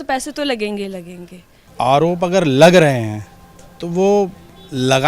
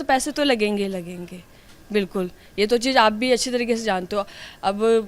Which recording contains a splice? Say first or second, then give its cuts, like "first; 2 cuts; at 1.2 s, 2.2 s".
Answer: first; 1 cut; at 1.6 s